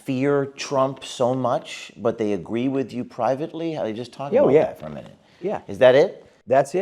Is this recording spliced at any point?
no; 0 cuts

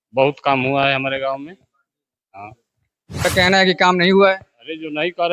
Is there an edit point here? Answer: yes; 1 cut; at 3.3 s

